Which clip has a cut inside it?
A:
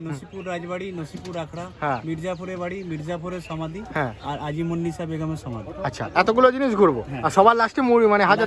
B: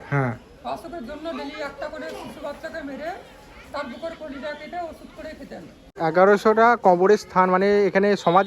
B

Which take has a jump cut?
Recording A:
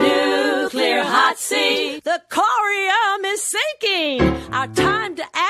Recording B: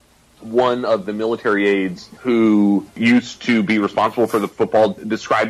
B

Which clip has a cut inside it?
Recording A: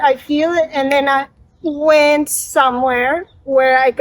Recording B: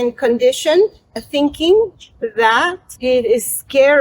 B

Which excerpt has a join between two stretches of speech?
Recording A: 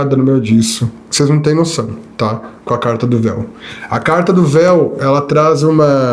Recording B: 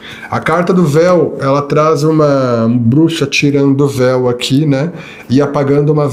A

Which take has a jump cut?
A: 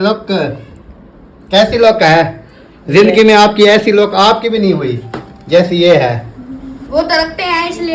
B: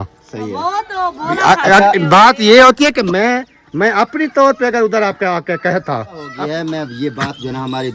B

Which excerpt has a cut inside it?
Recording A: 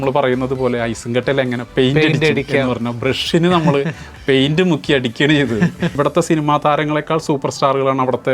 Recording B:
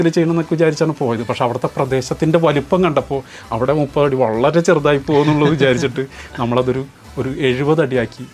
A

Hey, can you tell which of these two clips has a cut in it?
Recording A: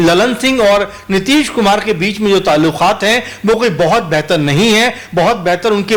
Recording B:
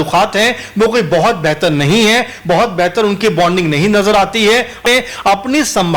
B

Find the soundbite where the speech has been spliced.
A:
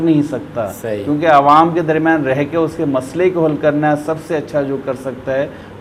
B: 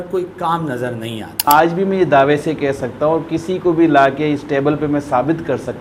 B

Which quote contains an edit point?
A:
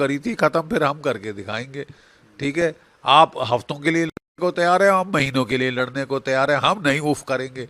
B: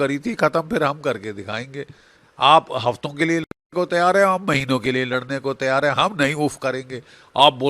B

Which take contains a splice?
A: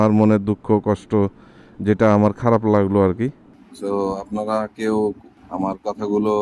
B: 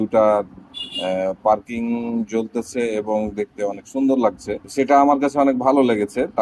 B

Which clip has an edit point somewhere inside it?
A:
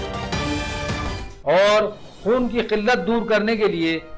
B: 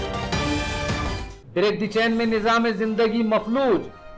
B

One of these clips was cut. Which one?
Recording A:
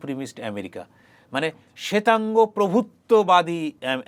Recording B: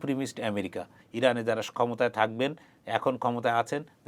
B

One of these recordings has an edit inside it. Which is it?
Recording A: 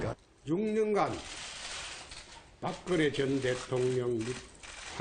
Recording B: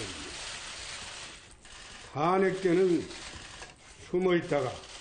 B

